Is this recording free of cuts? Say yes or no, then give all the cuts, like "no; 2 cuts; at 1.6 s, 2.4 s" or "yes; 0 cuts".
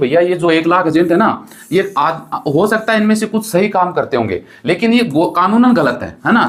yes; 0 cuts